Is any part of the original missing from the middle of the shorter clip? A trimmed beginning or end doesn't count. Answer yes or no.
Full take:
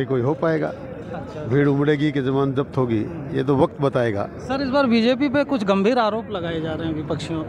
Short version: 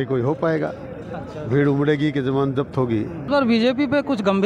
yes